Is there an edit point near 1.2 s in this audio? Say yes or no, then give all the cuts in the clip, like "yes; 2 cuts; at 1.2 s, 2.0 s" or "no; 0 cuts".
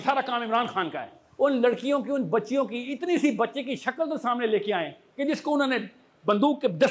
yes; 1 cut; at 1.2 s